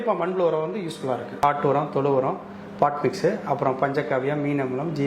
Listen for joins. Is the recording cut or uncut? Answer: cut